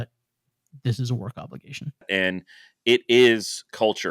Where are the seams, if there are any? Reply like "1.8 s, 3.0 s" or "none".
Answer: 2.1 s